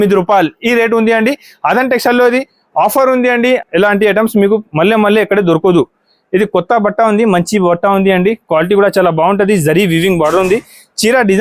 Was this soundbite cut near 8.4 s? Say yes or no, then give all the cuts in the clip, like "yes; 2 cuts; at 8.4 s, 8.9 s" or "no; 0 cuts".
no; 1 cut; at 3.6 s